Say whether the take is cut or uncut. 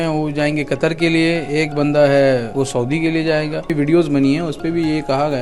cut